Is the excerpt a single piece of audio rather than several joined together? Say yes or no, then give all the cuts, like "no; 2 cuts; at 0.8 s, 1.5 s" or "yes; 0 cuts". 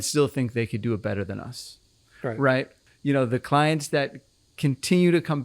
no; 1 cut; at 2.8 s